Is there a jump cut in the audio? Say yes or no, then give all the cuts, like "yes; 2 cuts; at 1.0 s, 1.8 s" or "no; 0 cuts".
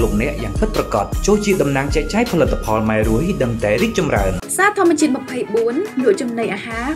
yes; 1 cut; at 4.3 s